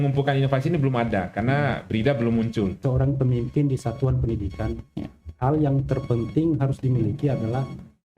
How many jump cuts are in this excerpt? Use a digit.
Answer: 1